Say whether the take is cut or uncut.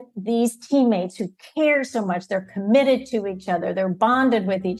uncut